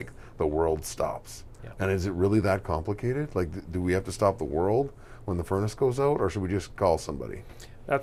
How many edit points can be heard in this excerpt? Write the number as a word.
zero